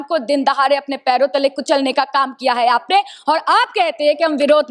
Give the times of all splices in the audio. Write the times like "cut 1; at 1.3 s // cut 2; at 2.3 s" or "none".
none